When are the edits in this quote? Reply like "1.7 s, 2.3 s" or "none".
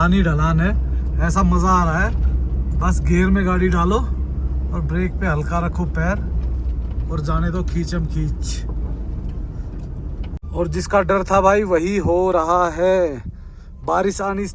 none